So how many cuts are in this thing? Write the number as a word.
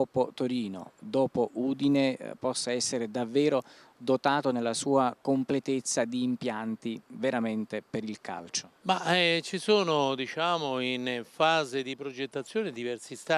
one